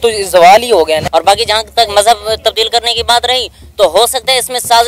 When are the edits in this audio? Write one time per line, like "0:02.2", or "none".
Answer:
0:01.0